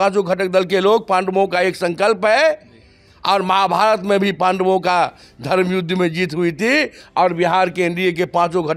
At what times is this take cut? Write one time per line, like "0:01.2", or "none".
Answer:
none